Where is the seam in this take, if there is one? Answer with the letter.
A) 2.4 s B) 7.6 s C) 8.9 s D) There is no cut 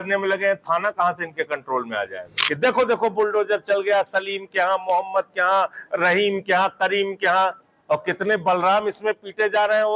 A